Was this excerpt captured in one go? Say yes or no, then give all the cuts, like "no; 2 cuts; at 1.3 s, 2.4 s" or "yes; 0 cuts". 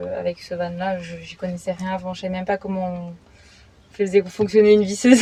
yes; 0 cuts